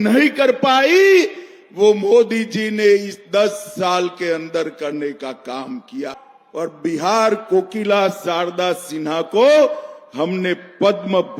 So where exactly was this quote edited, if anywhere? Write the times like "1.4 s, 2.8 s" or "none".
6.1 s